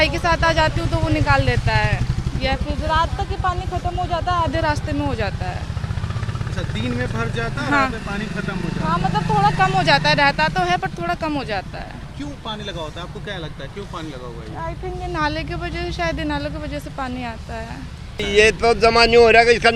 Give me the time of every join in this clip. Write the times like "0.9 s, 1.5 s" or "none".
18.2 s